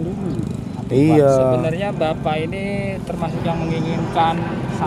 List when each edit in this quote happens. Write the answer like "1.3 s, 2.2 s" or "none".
none